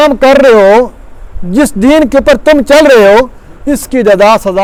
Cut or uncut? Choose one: uncut